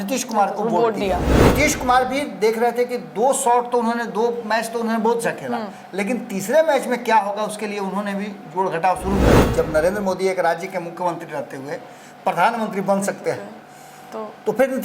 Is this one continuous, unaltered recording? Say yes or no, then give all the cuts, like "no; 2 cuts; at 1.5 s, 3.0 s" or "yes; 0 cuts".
no; 2 cuts; at 1.3 s, 9.4 s